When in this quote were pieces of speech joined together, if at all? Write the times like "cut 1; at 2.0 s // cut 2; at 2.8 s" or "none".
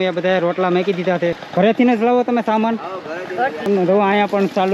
cut 1; at 1.4 s // cut 2; at 3.7 s